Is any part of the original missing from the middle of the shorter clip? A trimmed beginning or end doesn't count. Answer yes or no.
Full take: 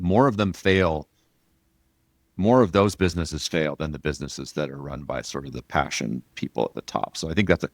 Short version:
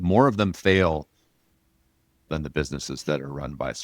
yes